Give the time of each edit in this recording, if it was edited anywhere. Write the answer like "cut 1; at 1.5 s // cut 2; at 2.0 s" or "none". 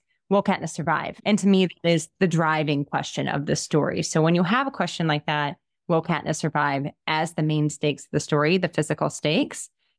cut 1; at 1.1 s